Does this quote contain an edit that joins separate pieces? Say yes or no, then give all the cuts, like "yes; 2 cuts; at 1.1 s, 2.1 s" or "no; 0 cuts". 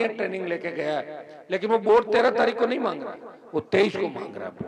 no; 0 cuts